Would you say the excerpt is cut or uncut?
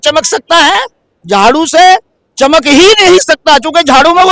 uncut